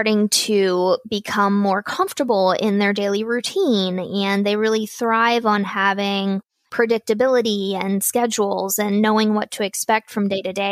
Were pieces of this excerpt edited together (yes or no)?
no